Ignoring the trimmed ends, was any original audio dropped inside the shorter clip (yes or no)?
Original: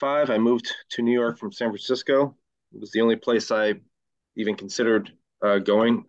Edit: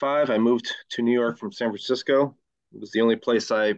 no